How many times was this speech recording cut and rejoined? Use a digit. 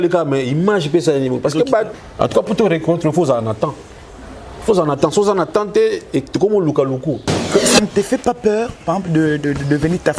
2